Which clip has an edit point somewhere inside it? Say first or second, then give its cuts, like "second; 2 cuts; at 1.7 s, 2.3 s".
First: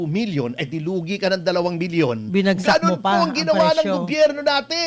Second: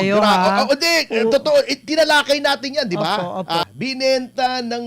second; 1 cut; at 3.6 s